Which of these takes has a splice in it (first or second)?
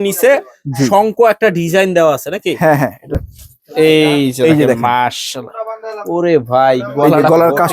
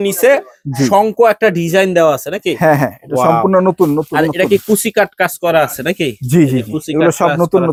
first